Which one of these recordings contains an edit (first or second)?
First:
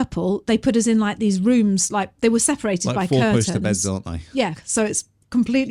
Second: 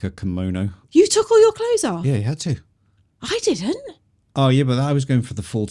first